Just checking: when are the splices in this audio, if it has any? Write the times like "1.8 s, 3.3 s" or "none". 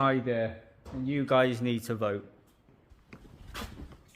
2.9 s